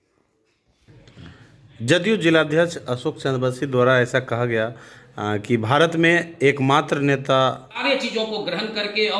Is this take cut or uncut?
cut